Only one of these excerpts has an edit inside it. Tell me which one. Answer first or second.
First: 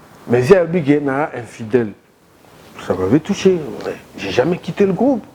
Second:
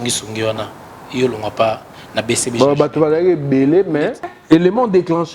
second